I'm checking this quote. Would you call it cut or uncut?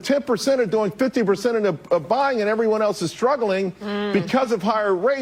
uncut